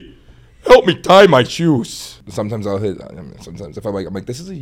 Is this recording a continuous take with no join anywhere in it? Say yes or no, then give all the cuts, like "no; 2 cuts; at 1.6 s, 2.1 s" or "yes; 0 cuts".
no; 1 cut; at 2.2 s